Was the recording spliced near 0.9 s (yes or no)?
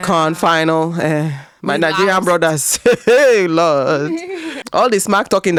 no